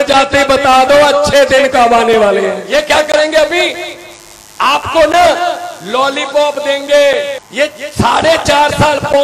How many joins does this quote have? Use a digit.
2